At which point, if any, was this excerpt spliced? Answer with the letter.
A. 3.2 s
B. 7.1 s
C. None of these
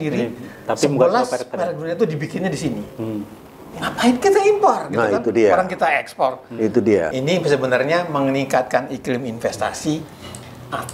B